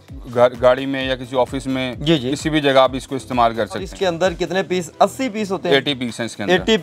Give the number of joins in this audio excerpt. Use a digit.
1